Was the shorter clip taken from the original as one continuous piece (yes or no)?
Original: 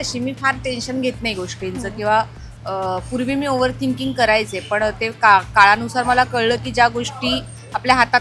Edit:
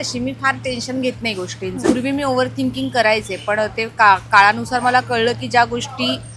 no